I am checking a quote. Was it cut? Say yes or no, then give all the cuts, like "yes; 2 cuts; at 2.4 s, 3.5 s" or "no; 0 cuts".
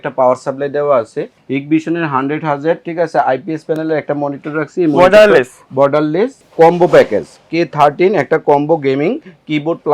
yes; 2 cuts; at 1.3 s, 6.4 s